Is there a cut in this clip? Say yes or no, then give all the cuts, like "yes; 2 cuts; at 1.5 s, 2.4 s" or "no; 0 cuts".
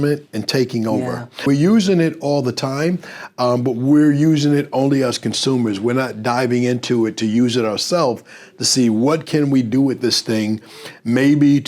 yes; 1 cut; at 1.5 s